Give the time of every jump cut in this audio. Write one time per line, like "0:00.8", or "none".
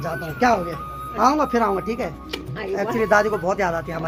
none